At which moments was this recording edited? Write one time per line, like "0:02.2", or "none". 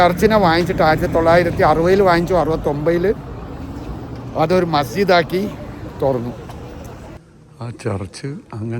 0:07.1